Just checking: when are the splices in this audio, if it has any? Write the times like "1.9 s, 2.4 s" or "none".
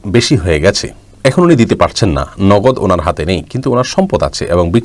none